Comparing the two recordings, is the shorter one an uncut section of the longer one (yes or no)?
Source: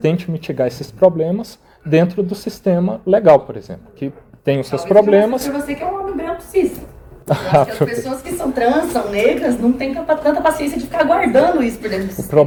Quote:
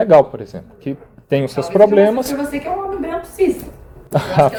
yes